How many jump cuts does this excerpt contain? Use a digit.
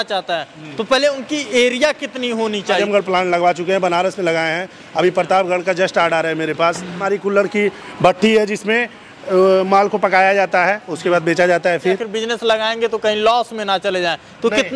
3